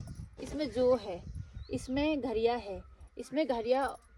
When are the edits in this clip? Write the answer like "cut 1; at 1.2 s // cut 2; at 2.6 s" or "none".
none